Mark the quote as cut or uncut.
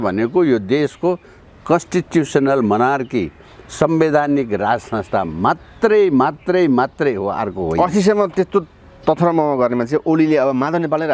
uncut